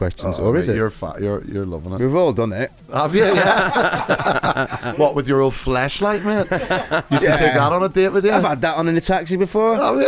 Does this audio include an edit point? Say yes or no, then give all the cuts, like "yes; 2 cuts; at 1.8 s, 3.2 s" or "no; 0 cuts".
yes; 1 cut; at 1.9 s